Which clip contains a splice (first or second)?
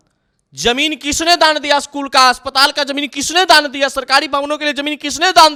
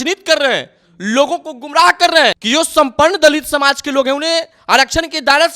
second